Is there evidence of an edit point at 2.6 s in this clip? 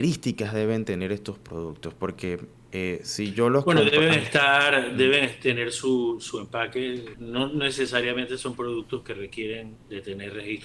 yes; 3 cuts; at 2.6 s, 7.1 s, 9.8 s

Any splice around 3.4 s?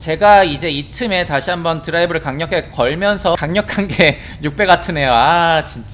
yes; 1 cut; at 3.4 s

